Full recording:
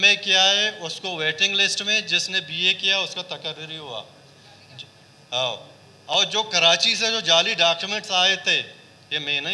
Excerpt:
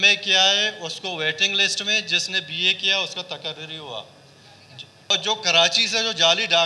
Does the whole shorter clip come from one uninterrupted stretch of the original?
no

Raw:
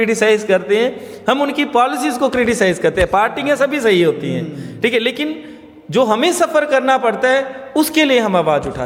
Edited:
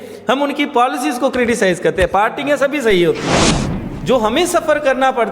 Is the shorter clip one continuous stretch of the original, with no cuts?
no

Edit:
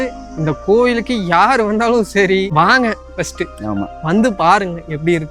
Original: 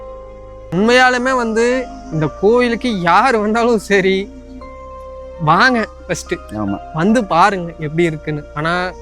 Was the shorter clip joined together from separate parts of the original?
yes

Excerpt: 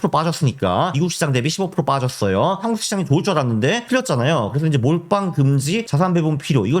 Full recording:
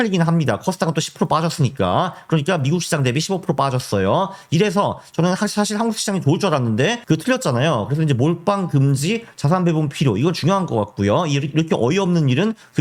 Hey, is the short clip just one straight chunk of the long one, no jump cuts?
no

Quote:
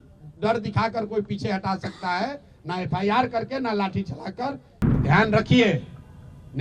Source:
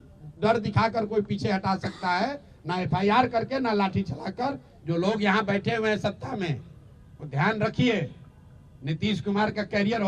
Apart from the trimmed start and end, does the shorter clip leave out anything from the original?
yes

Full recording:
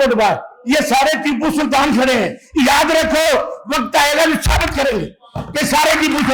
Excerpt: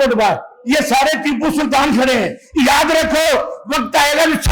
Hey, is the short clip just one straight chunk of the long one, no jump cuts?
yes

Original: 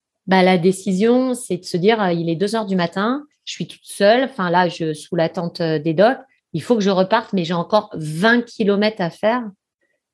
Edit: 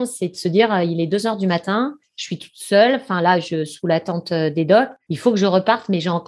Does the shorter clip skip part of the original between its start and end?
yes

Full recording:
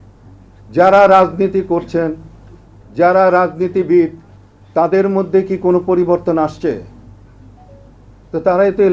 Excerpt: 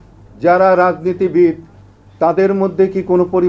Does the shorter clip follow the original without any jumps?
yes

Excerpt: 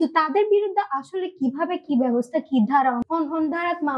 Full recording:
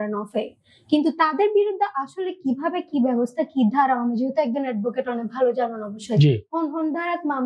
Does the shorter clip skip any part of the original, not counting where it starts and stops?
yes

